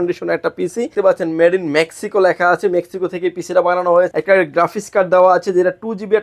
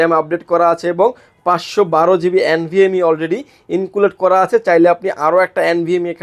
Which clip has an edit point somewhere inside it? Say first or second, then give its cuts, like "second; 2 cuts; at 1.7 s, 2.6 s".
first; 2 cuts; at 0.9 s, 4.1 s